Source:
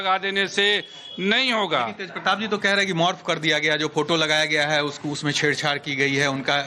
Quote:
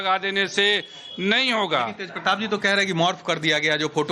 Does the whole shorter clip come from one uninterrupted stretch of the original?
yes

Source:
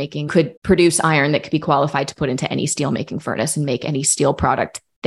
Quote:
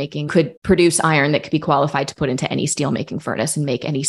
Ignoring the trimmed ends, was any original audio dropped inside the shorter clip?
no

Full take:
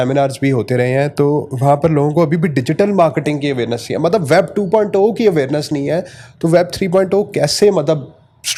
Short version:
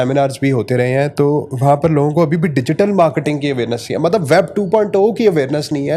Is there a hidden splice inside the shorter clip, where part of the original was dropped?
no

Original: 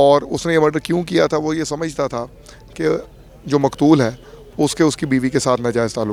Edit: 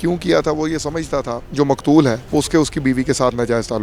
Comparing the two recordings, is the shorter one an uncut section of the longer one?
no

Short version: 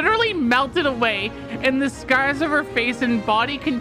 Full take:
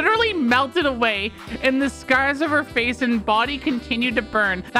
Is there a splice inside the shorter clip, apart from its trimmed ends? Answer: no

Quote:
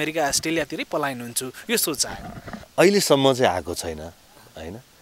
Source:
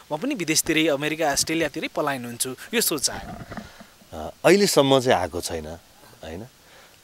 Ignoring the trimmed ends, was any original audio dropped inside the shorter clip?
yes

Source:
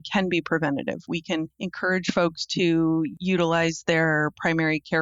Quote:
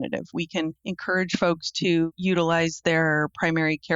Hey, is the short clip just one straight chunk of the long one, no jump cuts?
no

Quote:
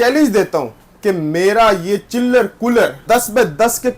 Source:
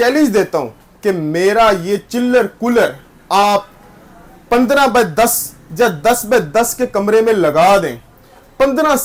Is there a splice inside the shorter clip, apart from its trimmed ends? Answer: yes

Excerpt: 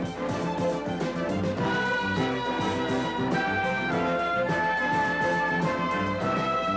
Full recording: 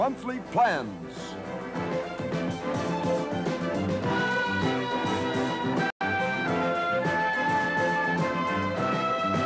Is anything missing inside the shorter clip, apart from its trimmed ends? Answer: yes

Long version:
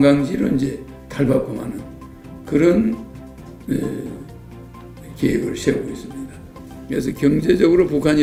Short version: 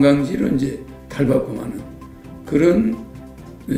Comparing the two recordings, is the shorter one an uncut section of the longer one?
yes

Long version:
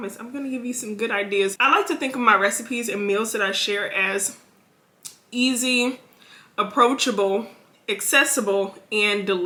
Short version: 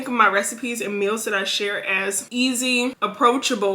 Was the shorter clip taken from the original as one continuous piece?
no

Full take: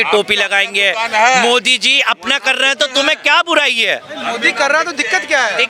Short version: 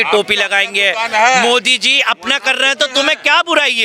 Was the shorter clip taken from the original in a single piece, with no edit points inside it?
yes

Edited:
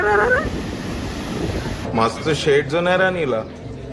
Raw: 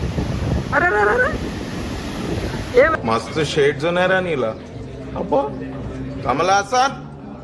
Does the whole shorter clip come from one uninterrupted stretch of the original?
no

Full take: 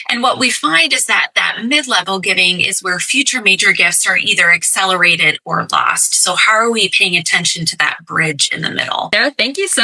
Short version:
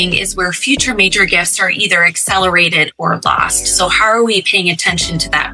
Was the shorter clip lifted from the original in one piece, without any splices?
yes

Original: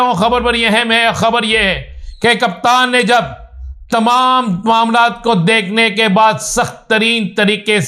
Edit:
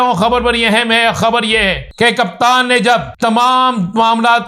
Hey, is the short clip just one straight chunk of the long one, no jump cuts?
no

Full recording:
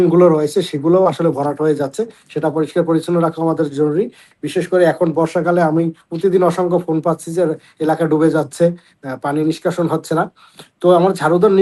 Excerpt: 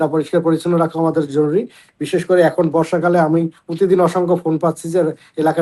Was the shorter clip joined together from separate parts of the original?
no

